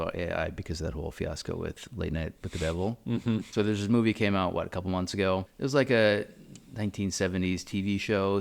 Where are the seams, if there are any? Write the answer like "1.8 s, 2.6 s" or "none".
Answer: 3.5 s, 5.5 s